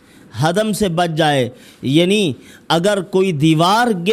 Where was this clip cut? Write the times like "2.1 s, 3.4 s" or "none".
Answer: none